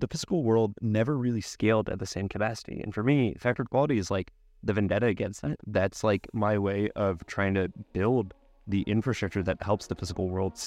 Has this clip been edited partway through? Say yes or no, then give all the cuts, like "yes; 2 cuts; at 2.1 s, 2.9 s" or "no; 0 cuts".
no; 0 cuts